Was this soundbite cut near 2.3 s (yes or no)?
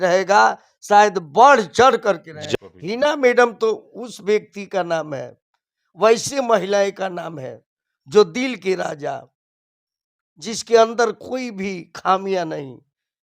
yes